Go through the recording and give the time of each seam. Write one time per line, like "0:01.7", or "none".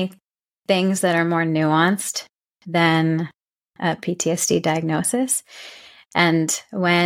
none